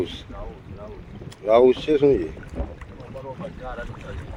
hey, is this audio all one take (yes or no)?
yes